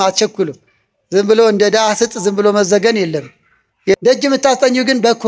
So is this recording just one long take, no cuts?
no; 1 cut; at 4.0 s

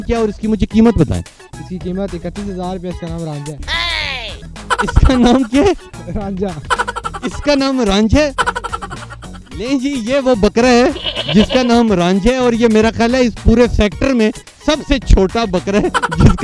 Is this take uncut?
yes; 0 cuts

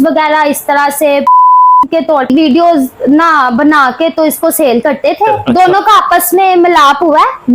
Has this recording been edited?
yes; 1 cut; at 5.4 s

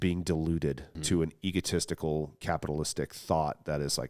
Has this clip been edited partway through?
yes; 2 cuts; at 0.9 s, 2.4 s

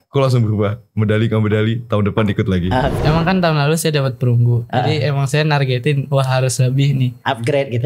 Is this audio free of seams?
no; 1 cut; at 3.0 s

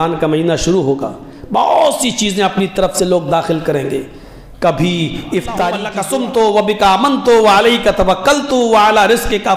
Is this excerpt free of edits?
no; 1 cut; at 5.9 s

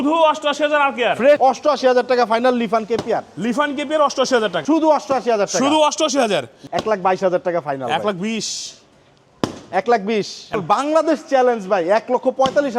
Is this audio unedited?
no; 4 cuts; at 1.4 s, 4.6 s, 6.6 s, 10.5 s

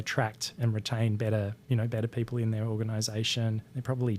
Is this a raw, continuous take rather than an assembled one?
yes; 0 cuts

